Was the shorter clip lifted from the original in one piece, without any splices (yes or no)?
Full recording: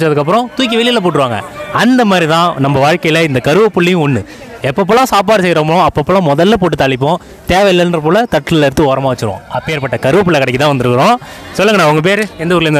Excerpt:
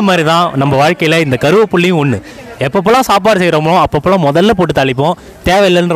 yes